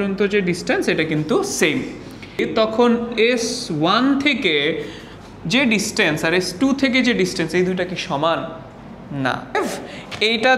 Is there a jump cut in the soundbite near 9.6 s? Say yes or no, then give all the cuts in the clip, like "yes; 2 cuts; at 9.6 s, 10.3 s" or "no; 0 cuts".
yes; 2 cuts; at 2.4 s, 9.6 s